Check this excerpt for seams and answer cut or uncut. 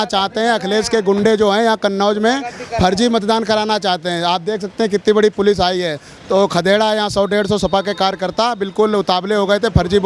uncut